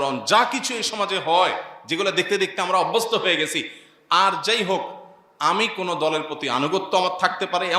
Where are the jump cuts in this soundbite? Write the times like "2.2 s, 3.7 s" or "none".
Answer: none